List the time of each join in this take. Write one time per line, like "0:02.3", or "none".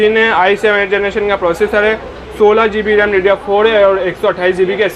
none